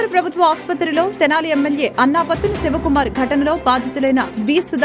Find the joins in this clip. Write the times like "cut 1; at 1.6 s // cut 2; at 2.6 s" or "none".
none